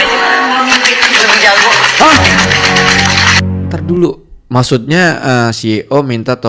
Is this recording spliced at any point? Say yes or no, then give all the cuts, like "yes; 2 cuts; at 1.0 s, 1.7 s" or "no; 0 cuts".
no; 0 cuts